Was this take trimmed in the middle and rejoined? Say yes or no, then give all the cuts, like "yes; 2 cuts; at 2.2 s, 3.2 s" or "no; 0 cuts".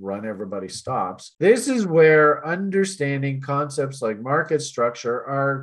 yes; 1 cut; at 1.3 s